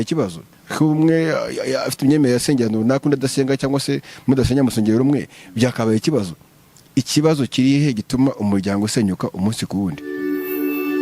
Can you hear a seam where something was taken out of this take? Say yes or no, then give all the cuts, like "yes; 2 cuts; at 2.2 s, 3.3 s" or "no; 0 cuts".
yes; 1 cut; at 10.0 s